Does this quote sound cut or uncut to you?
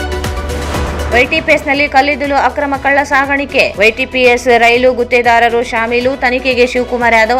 uncut